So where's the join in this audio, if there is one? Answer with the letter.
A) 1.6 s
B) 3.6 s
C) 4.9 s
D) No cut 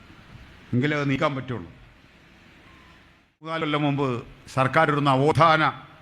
B